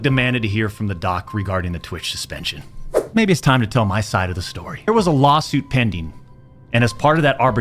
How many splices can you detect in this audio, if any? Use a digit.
2